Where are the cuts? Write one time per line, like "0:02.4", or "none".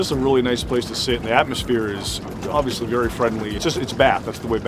0:03.6